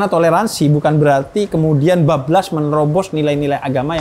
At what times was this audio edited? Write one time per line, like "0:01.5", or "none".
none